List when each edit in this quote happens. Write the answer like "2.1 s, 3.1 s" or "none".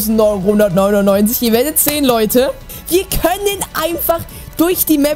2.7 s